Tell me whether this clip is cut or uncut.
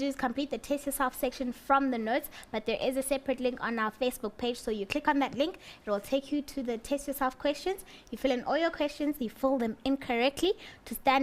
cut